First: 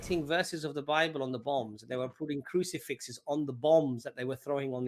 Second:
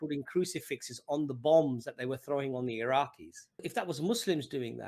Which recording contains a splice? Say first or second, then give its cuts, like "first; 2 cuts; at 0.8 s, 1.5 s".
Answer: second; 1 cut; at 3.7 s